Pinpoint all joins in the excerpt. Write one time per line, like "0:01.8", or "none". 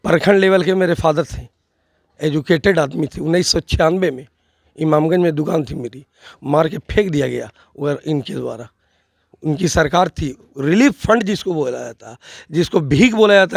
none